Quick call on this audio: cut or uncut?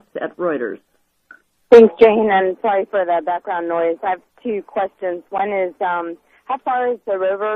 cut